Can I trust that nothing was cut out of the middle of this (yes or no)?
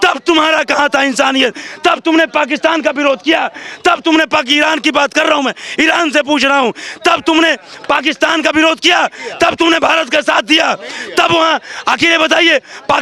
yes